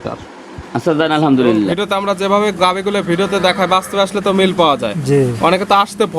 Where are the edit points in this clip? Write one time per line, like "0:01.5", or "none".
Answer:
0:01.8